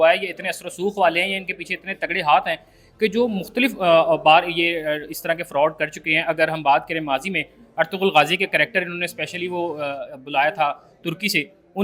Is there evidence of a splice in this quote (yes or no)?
no